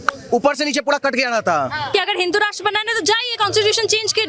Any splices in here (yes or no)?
yes